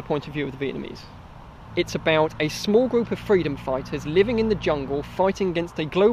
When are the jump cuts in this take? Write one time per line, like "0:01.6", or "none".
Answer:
0:01.7